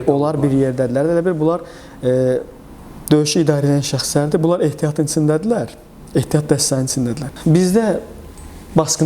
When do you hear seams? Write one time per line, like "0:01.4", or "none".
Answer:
0:07.3